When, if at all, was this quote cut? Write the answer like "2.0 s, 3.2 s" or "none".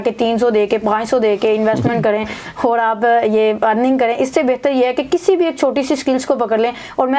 none